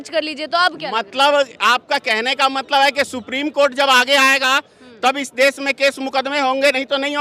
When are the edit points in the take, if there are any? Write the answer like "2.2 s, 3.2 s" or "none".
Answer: none